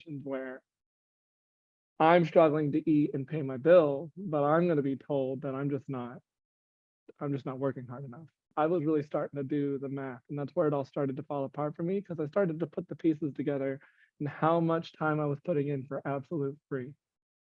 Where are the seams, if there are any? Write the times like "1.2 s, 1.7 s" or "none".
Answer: 8.5 s